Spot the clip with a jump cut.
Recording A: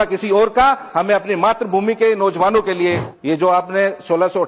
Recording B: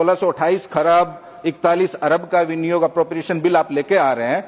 A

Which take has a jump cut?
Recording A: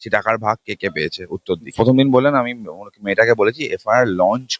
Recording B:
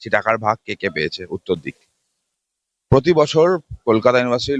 A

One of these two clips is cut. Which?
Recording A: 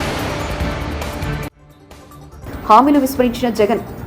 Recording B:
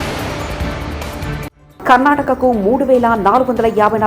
B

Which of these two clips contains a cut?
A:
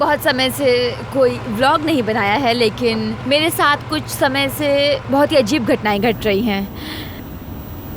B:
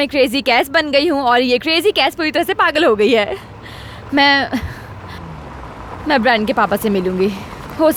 A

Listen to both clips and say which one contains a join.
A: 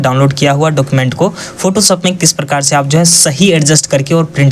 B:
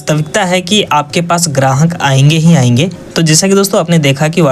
B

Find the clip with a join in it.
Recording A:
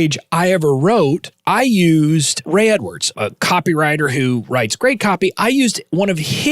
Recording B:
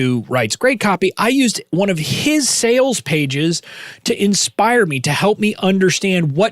A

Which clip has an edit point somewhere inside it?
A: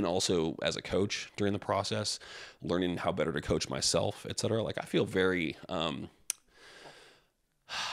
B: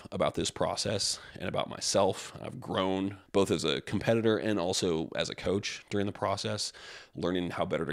B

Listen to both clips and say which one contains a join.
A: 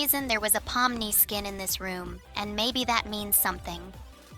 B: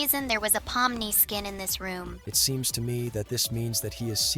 B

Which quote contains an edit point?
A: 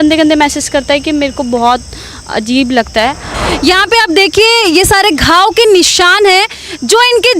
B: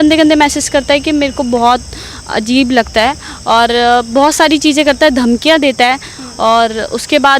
A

